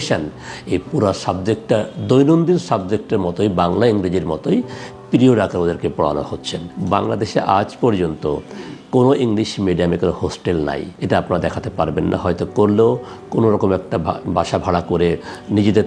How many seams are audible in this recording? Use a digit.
0